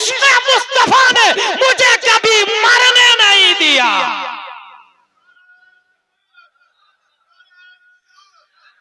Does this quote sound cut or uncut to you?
uncut